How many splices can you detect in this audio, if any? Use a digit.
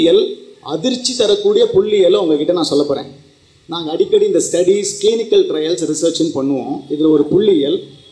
0